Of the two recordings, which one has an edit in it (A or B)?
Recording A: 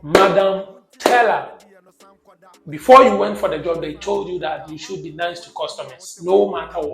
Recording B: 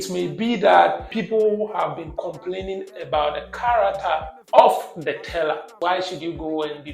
B